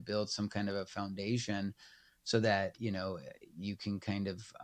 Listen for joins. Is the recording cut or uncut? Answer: cut